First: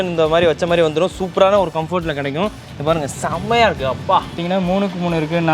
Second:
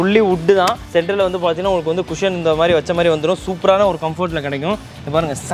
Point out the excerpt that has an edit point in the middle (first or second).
first